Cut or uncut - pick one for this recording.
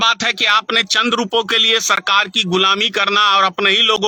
uncut